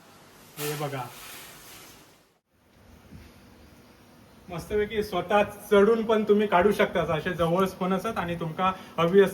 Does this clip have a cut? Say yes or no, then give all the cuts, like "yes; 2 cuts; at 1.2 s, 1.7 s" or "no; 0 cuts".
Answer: yes; 1 cut; at 2.4 s